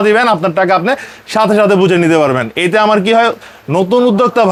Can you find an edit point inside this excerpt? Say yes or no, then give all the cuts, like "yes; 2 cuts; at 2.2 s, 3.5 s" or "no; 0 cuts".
no; 0 cuts